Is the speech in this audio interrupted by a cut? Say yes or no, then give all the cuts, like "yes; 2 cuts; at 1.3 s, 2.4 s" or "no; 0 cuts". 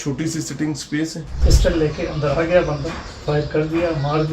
yes; 1 cut; at 1.4 s